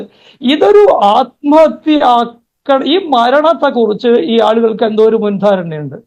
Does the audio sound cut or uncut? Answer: uncut